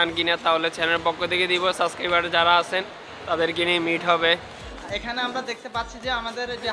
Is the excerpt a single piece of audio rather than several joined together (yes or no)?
no